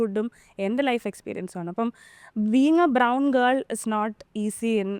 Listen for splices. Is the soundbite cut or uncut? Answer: uncut